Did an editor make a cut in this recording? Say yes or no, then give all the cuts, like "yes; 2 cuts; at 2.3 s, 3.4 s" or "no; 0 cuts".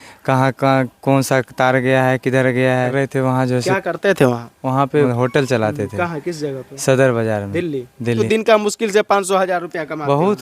yes; 3 cuts; at 2.9 s, 5.1 s, 8.2 s